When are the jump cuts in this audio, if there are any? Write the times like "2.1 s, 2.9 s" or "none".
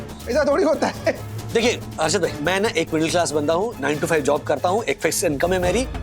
1.3 s